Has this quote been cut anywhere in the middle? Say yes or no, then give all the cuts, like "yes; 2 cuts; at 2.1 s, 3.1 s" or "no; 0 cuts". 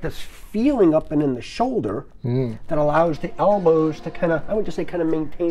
no; 0 cuts